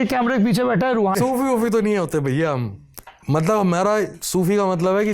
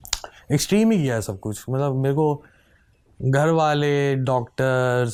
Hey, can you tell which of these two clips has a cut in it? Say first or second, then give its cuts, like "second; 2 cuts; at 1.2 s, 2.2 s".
first; 1 cut; at 1.2 s